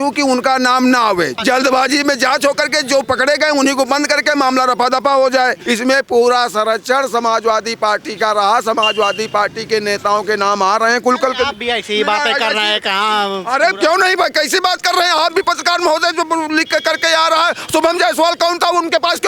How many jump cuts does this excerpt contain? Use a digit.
2